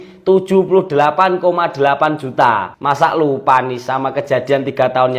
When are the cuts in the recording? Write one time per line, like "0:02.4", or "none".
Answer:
0:02.7